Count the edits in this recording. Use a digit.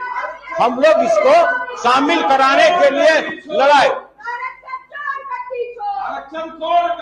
0